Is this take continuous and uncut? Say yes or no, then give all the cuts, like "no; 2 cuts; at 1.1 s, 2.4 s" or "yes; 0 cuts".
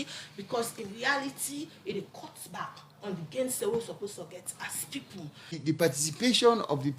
no; 1 cut; at 5.5 s